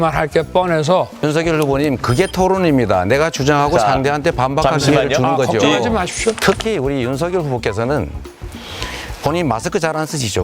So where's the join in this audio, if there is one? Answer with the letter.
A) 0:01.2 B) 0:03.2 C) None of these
A